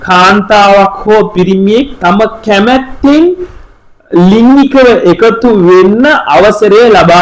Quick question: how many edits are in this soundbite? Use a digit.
0